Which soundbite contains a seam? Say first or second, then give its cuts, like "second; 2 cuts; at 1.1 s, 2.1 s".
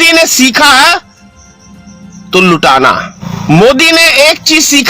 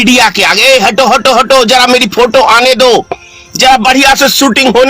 first; 1 cut; at 3.3 s